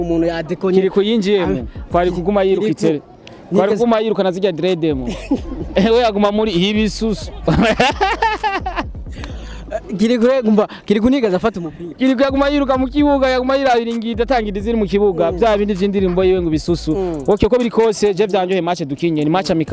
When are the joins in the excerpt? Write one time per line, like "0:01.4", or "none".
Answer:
none